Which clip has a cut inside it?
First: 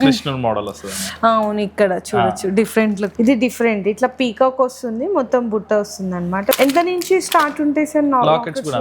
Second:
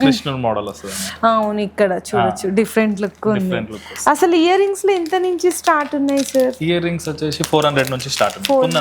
first; 2 cuts; at 3.1 s, 6.5 s

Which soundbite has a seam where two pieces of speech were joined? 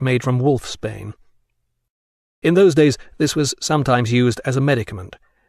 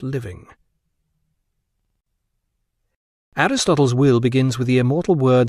first; 1 cut; at 4.4 s

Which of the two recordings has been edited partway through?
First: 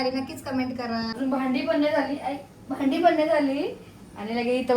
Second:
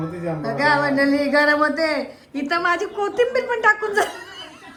first; 1 cut; at 1.1 s

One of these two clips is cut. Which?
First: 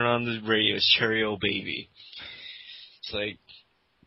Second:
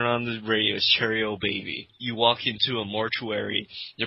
second; 1 cut; at 1.9 s

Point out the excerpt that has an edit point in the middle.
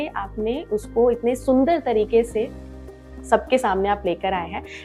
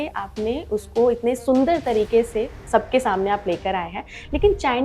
second; 1 cut; at 2.6 s

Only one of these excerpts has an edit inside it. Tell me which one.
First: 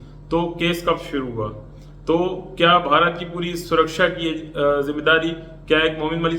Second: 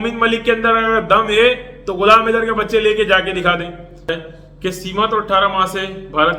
second; 1 cut; at 4.1 s

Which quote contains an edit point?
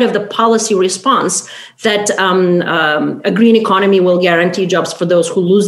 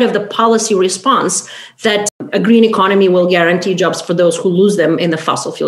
second; 1 cut; at 2.2 s

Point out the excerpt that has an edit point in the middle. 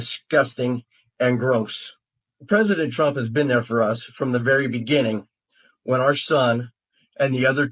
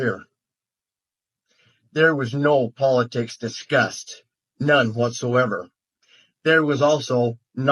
first; 1 cut; at 2.3 s

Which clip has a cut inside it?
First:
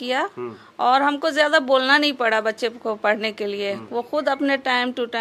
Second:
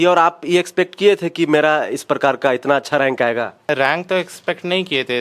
second; 1 cut; at 3.7 s

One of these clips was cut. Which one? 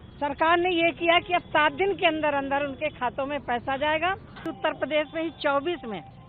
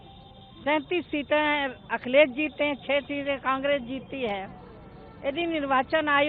first; 1 cut; at 4.5 s

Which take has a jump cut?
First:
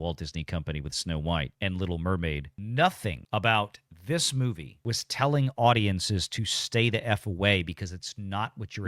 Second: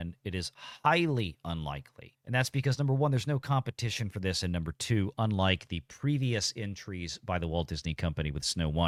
first; 2 cuts; at 3.1 s, 4.7 s

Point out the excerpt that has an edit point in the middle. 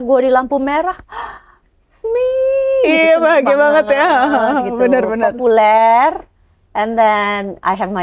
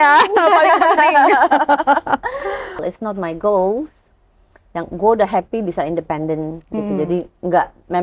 second; 1 cut; at 2.8 s

